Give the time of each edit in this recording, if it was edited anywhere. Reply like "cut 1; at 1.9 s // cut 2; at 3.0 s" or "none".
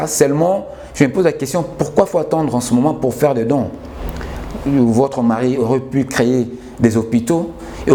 none